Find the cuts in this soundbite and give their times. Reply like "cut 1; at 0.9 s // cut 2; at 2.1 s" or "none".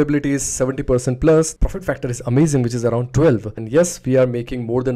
cut 1; at 1.5 s // cut 2; at 3.5 s